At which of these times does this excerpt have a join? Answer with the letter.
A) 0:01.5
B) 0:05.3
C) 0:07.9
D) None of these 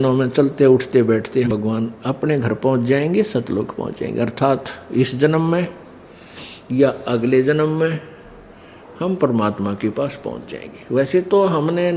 A